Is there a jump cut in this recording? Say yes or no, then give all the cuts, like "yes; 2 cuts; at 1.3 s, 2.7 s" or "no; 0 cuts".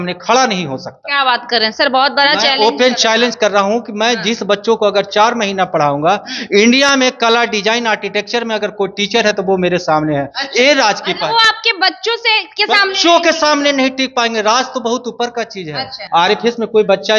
yes; 1 cut; at 16.0 s